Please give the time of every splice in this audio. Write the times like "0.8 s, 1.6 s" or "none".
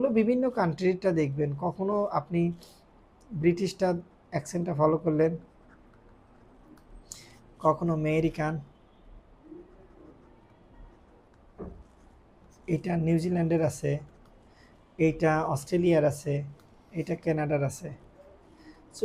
none